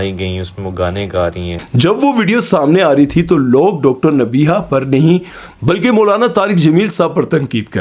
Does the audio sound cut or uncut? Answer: uncut